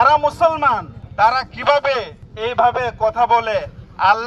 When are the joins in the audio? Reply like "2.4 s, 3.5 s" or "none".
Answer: none

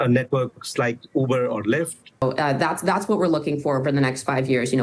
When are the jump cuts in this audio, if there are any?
2.0 s

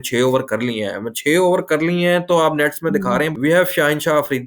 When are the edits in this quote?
3.3 s

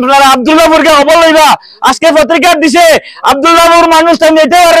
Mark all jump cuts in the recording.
none

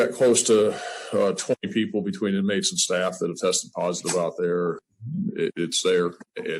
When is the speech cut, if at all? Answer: 4.9 s

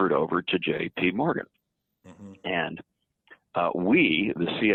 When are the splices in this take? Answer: none

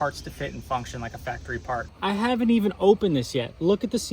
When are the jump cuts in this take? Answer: 1.9 s

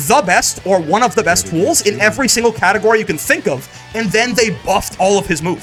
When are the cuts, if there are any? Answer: none

